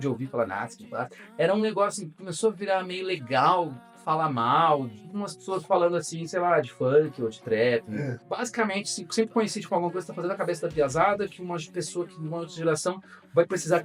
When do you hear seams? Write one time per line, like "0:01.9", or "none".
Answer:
none

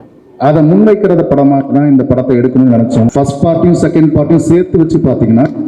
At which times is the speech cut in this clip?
0:03.1

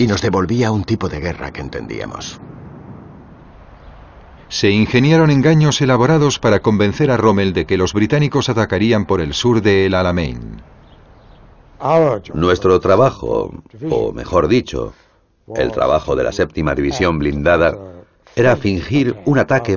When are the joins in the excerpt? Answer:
0:04.5

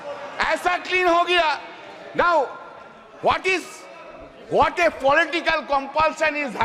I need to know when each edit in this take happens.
none

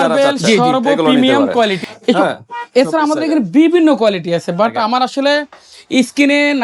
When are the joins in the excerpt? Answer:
0:01.8

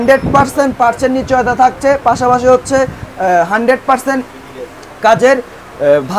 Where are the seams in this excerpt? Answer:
none

